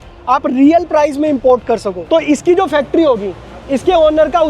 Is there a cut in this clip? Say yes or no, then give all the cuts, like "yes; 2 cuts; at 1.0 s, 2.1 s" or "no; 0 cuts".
yes; 1 cut; at 2.1 s